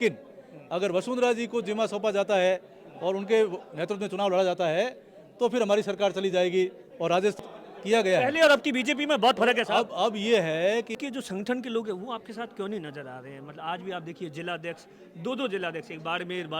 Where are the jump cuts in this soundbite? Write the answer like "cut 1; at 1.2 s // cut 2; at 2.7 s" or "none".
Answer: cut 1; at 7.4 s // cut 2; at 11.0 s